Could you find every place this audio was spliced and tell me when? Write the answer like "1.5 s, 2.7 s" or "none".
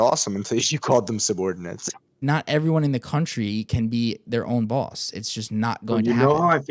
2.2 s